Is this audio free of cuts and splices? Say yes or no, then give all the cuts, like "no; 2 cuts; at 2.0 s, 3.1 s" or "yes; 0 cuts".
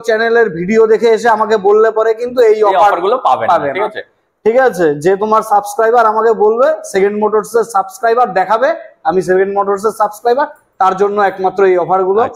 yes; 0 cuts